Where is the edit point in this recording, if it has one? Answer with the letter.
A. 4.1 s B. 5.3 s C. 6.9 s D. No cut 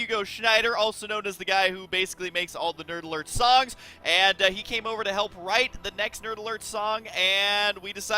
C